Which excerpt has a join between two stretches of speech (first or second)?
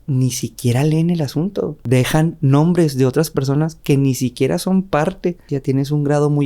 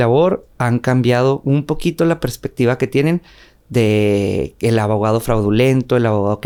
first